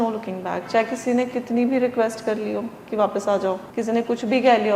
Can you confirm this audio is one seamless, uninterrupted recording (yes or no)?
no